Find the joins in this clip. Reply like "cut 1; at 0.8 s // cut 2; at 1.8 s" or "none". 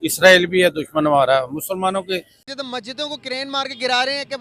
cut 1; at 2.4 s